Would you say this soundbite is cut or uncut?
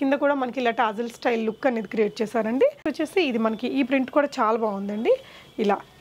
uncut